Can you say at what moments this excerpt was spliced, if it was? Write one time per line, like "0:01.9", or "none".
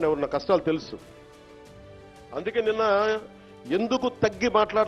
none